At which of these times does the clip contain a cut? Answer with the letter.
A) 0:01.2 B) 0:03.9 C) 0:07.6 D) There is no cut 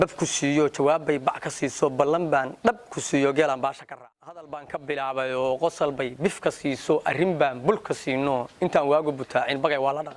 B